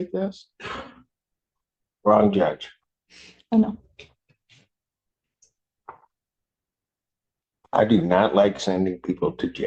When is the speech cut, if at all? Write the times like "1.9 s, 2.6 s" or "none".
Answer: none